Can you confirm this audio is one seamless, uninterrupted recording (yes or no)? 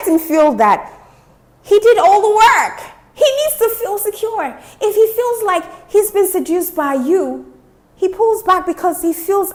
yes